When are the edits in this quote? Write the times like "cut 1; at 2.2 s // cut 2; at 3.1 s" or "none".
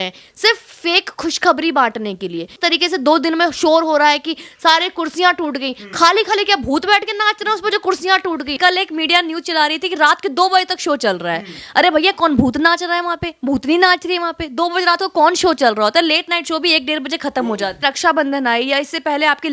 cut 1; at 2.6 s // cut 2; at 8.6 s // cut 3; at 17.8 s